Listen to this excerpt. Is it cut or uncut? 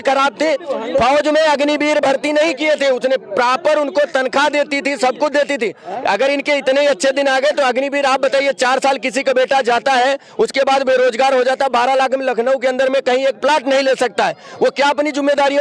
uncut